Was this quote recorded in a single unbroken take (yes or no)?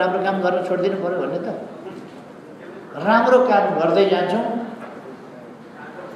yes